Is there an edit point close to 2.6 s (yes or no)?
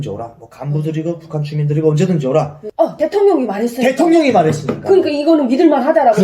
yes